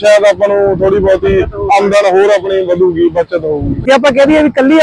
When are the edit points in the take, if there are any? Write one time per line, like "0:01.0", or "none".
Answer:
0:03.8